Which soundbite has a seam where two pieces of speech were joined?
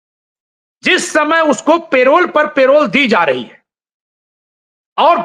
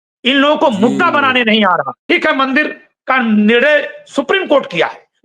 second; 1 cut; at 2.0 s

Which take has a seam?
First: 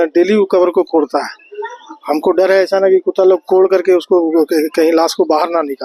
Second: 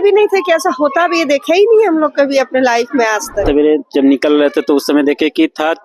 second; 1 cut; at 3.4 s

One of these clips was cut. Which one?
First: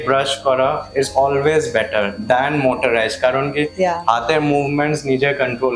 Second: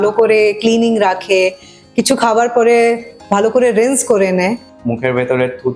second; 1 cut; at 4.7 s

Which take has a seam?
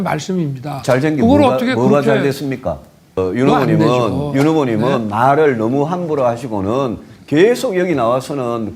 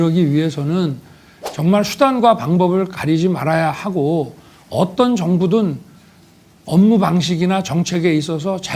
first; 1 cut; at 3.2 s

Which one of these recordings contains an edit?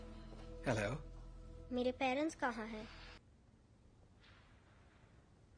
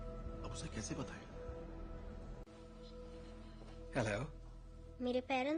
first; 1 cut; at 3.2 s

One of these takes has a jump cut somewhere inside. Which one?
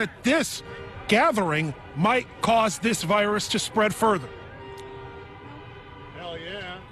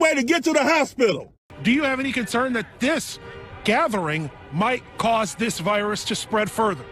second; 1 cut; at 1.3 s

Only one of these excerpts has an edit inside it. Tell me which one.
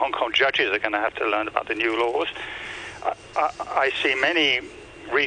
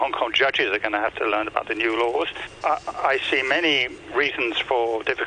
second; 2 cuts; at 2.5 s, 4.0 s

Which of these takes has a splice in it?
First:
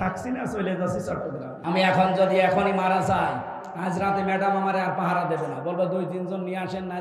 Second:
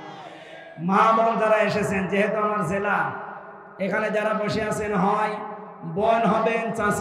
first; 1 cut; at 1.5 s

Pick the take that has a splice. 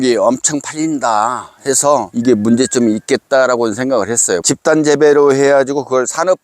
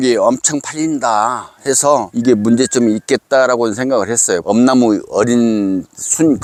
first; 1 cut; at 4.4 s

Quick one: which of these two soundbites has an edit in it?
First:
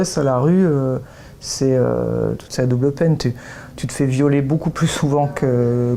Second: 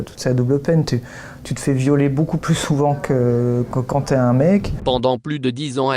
second; 1 cut; at 4.7 s

